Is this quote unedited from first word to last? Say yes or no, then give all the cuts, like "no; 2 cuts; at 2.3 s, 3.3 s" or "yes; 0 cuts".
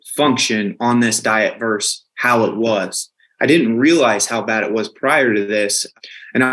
yes; 0 cuts